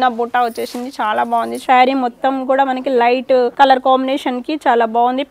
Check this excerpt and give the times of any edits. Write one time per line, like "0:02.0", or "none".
0:01.6
0:03.5